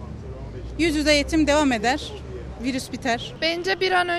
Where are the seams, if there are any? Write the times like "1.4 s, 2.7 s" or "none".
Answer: 3.3 s

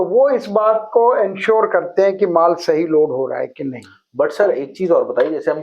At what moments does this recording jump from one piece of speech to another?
none

